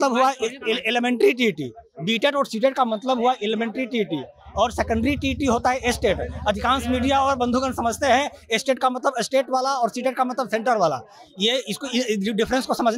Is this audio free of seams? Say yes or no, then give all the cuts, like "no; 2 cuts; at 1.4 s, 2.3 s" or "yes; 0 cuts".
yes; 0 cuts